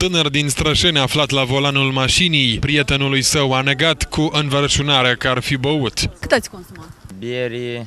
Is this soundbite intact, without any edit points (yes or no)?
no